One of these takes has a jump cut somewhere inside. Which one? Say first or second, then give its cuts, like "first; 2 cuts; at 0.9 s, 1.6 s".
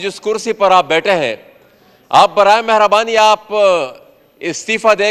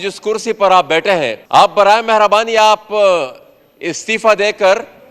second; 1 cut; at 1.4 s